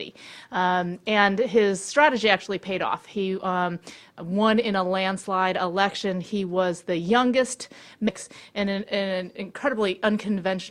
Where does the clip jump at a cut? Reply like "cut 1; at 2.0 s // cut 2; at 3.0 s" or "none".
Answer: none